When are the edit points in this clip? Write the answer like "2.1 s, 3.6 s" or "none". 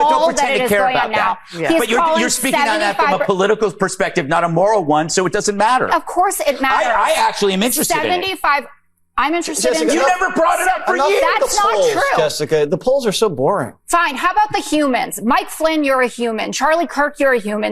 none